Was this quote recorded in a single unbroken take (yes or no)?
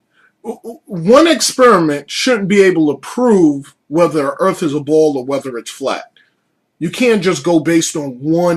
yes